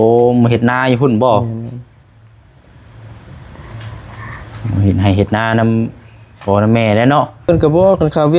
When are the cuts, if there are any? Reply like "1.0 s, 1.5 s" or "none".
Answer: 7.5 s